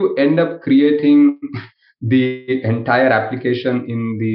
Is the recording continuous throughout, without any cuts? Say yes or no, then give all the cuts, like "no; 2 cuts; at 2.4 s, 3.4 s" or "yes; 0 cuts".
yes; 0 cuts